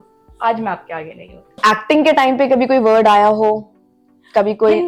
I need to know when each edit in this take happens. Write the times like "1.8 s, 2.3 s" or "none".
1.6 s